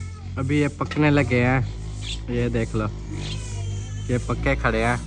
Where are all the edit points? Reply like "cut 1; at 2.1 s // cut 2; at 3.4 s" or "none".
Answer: none